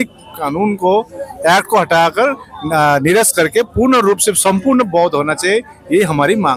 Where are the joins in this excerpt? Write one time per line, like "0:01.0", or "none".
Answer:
none